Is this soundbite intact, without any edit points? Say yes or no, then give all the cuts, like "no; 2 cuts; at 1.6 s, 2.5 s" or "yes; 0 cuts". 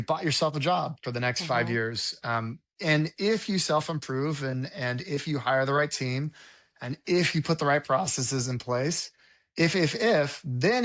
yes; 0 cuts